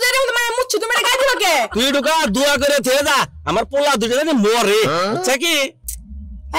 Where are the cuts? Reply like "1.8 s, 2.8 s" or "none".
1.7 s